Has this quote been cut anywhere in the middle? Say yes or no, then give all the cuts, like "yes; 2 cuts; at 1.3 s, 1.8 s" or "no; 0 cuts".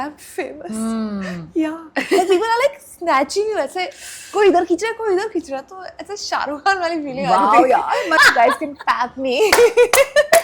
yes; 1 cut; at 8.1 s